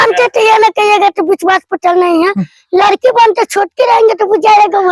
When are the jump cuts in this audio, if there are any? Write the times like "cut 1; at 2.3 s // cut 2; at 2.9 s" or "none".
none